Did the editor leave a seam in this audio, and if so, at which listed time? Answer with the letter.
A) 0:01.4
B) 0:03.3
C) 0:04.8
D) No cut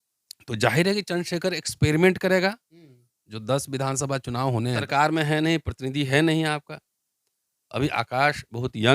C